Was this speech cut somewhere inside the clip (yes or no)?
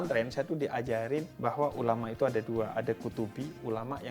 yes